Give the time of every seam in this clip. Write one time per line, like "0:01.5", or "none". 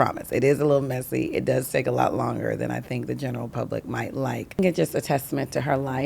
0:04.6